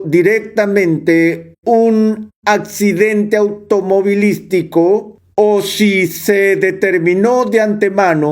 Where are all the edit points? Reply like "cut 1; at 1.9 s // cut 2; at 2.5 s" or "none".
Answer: cut 1; at 5.2 s